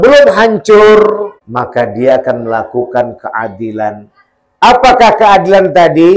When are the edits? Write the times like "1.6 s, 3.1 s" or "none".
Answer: 1.4 s